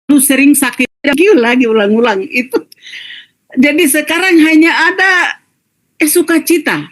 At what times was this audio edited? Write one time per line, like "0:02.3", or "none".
0:00.9